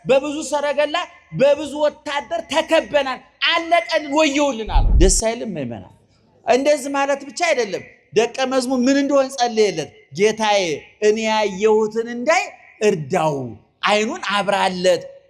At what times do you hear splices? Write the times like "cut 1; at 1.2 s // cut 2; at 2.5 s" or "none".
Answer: cut 1; at 4.8 s